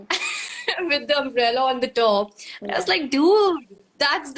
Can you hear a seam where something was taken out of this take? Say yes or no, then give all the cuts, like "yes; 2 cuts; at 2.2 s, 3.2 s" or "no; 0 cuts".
no; 0 cuts